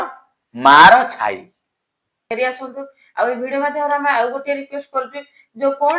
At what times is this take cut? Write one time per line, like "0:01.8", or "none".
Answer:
0:02.2